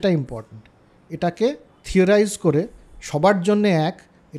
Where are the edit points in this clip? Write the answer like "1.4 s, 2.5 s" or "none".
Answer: none